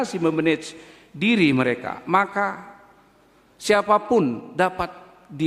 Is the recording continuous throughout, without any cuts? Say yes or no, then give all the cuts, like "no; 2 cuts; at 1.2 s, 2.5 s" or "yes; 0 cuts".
yes; 0 cuts